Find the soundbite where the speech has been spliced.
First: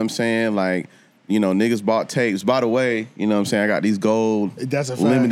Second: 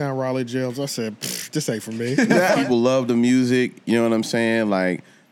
second; 1 cut; at 2.6 s

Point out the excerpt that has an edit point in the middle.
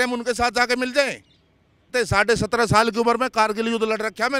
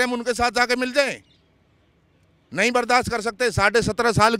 first; 1 cut; at 1.9 s

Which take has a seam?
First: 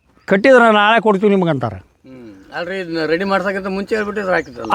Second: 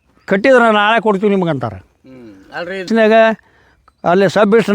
second; 1 cut; at 2.9 s

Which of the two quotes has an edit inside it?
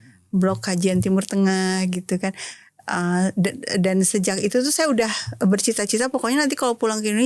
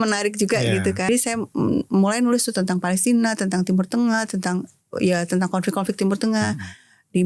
second; 1 cut; at 1.1 s

